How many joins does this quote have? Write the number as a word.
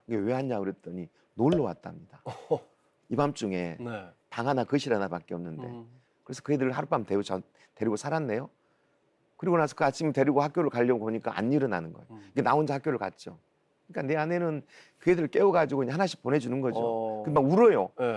one